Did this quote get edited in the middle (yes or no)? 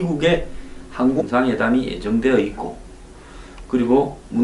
no